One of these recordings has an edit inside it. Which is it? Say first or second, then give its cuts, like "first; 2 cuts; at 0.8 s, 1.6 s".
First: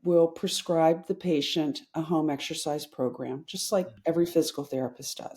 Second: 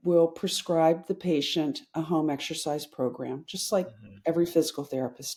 first; 1 cut; at 3.9 s